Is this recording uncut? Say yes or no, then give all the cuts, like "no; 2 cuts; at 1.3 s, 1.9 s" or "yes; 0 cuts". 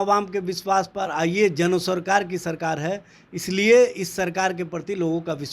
yes; 0 cuts